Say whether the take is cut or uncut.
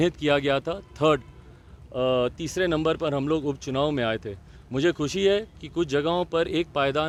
uncut